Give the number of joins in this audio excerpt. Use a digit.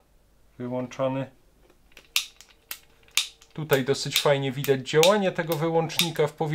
1